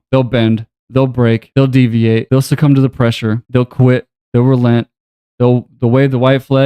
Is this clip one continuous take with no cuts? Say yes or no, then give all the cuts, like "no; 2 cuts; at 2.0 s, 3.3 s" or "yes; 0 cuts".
no; 3 cuts; at 1.5 s, 2.2 s, 3.4 s